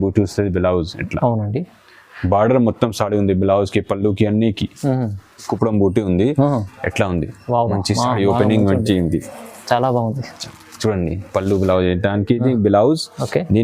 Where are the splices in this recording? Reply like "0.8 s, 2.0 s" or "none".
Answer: 5.5 s